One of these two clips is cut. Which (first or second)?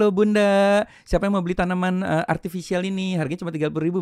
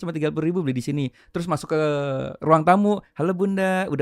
second